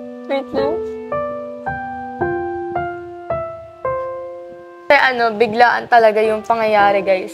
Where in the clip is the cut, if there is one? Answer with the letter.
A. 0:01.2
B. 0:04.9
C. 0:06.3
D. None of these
B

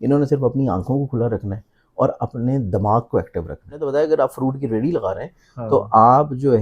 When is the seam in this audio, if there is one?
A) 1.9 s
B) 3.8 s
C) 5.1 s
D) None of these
B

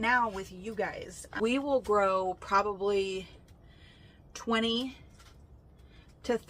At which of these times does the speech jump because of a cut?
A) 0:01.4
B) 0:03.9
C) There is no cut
A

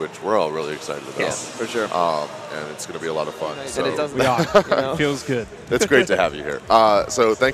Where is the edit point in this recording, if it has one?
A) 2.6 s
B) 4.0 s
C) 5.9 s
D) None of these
B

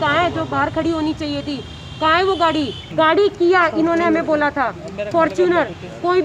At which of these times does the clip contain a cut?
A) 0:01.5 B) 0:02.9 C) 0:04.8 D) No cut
B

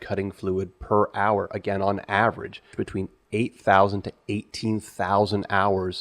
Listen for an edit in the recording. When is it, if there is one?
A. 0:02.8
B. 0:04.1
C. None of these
A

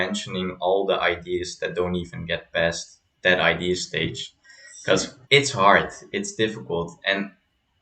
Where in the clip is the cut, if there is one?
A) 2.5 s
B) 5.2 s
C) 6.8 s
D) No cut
B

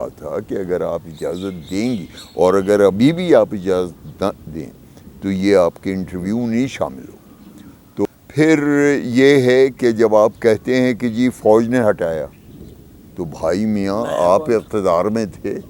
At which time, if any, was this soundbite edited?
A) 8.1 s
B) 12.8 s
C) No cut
A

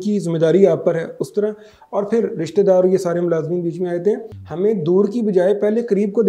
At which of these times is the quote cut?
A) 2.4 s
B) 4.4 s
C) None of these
B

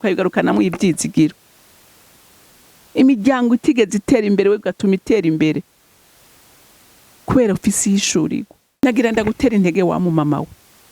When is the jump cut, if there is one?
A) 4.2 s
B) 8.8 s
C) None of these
B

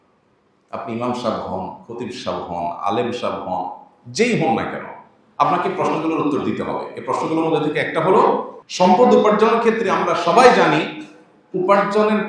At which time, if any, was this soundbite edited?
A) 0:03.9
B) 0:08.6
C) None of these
B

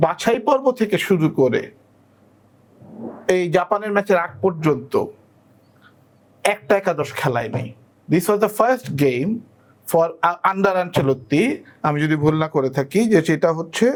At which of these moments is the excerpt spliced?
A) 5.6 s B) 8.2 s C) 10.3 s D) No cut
D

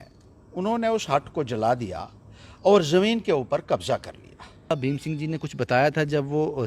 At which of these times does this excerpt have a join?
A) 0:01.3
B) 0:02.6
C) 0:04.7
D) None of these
C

